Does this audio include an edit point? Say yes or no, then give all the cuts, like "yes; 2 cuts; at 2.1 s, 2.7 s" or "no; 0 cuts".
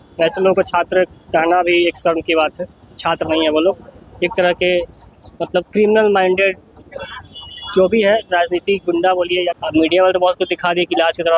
yes; 1 cut; at 9.6 s